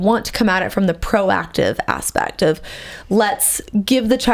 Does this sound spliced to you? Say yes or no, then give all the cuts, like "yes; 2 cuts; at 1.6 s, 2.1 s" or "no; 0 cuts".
no; 0 cuts